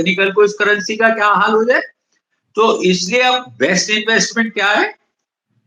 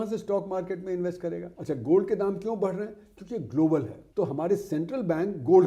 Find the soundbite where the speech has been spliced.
second; 2 cuts; at 1.5 s, 4.0 s

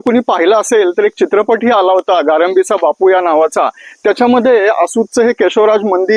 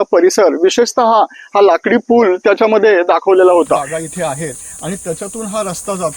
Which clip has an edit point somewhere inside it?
second; 1 cut; at 3.9 s

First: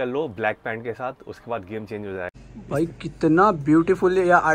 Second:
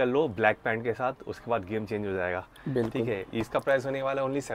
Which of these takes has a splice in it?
first; 1 cut; at 2.3 s

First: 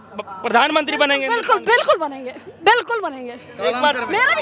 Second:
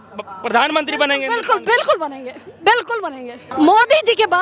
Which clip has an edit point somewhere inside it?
second; 1 cut; at 3.5 s

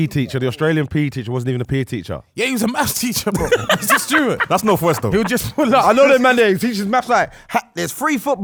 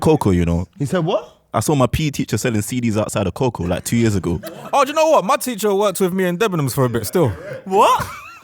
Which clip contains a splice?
second; 1 cut; at 4.5 s

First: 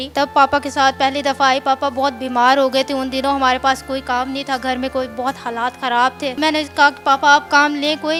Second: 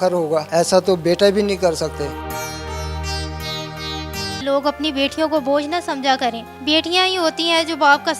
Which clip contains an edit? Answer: second; 1 cut; at 4.4 s

